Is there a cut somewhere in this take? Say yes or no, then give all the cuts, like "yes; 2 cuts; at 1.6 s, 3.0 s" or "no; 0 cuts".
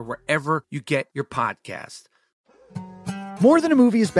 yes; 1 cut; at 2.2 s